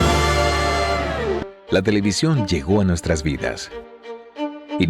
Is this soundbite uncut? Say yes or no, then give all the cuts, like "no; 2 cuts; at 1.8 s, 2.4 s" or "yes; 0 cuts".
no; 1 cut; at 1.5 s